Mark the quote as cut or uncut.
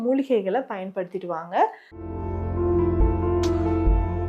cut